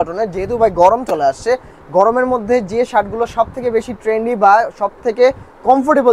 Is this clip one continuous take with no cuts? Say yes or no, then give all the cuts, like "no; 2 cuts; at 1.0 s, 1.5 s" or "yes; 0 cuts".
yes; 0 cuts